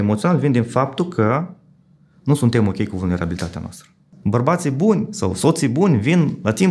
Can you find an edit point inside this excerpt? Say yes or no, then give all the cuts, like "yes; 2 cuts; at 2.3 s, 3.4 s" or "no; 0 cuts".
yes; 1 cut; at 4.0 s